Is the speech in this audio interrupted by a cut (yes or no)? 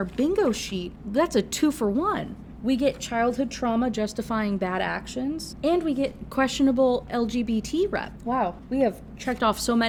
no